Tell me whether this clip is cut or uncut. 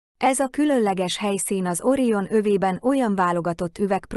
cut